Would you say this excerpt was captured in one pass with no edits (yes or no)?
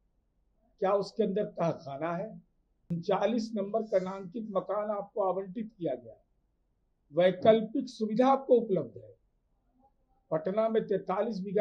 no